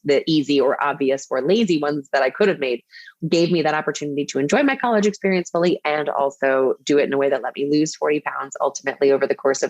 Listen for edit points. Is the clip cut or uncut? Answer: cut